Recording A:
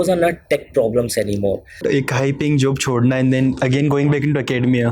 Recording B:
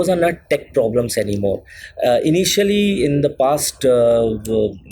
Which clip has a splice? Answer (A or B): A